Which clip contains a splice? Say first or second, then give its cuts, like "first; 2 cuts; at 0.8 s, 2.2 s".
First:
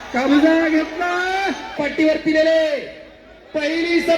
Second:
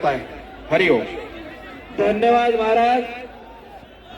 first; 1 cut; at 1.7 s